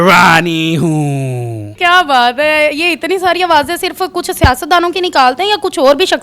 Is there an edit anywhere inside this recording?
no; 0 cuts

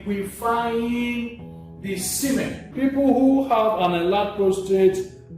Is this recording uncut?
no; 1 cut; at 2.7 s

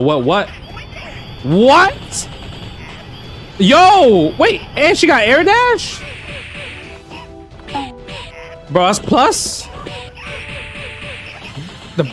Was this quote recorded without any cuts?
no; 2 cuts; at 6.0 s, 9.6 s

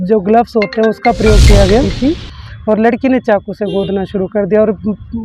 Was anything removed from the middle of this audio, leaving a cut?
yes; 1 cut; at 1.6 s

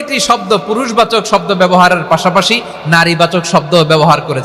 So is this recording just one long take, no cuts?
yes; 0 cuts

